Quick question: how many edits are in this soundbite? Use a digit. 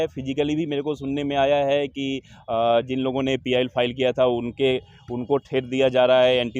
0